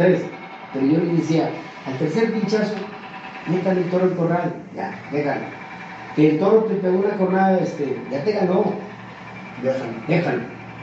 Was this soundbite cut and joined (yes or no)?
no